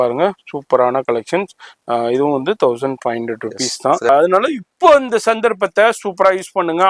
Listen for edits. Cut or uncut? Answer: cut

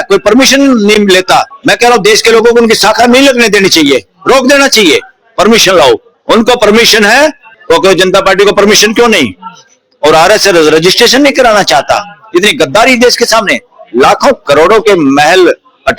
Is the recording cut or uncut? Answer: cut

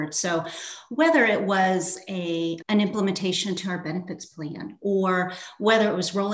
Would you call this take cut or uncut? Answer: uncut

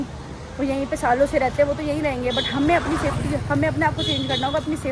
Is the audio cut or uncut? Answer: uncut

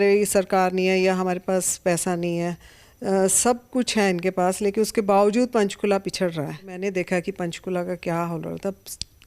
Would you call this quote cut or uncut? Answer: cut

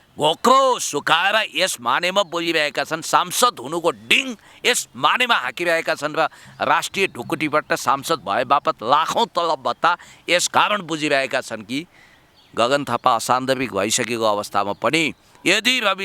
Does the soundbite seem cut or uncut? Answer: uncut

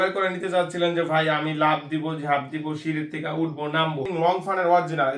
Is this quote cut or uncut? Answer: cut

